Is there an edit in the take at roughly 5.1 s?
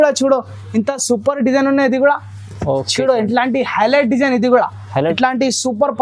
yes; 1 cut; at 5.1 s

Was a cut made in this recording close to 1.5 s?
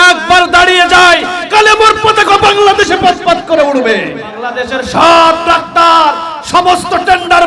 no; 1 cut; at 4.4 s

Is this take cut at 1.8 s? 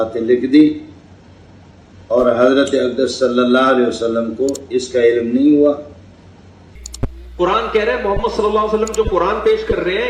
no; 0 cuts

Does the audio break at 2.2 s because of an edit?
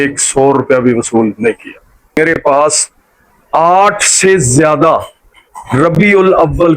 yes; 1 cut; at 2.2 s

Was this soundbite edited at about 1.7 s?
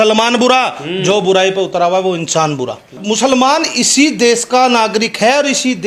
no; 1 cut; at 3.0 s

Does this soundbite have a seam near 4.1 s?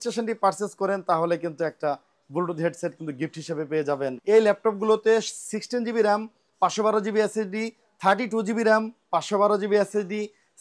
yes; 1 cut; at 4.1 s

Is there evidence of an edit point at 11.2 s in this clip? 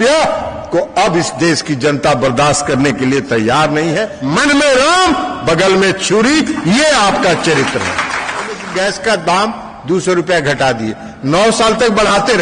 no; 2 cuts; at 4.2 s, 8.6 s

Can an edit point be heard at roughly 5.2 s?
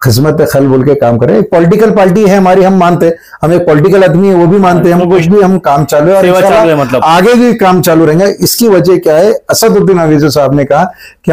yes; 1 cut; at 5.2 s

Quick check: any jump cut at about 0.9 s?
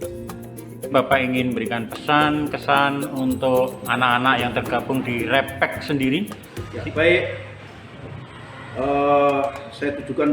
yes; 1 cut; at 0.9 s

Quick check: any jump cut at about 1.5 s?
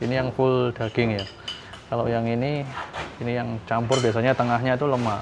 no; 0 cuts

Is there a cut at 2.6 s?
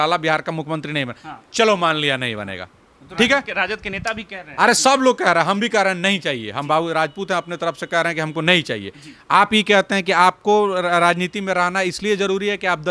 no; 0 cuts

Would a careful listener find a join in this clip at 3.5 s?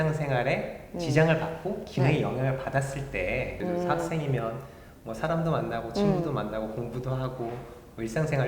yes; 1 cut; at 3.5 s

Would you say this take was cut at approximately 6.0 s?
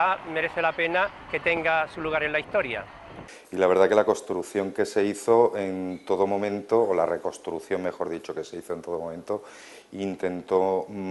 no; 1 cut; at 3.2 s

